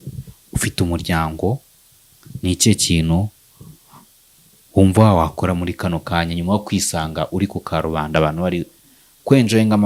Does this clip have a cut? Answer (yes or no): no